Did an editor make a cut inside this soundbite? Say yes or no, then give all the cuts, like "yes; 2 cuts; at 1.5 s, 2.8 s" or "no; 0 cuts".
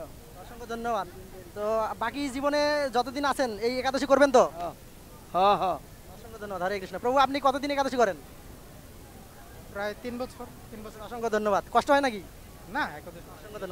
no; 0 cuts